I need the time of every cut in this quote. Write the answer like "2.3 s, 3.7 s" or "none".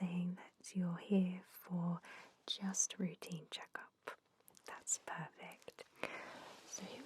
5.9 s